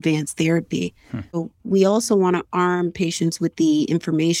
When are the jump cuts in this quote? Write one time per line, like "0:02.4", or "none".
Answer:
0:01.4